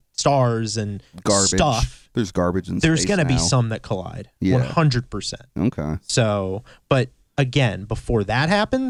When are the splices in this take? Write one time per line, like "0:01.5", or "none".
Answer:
none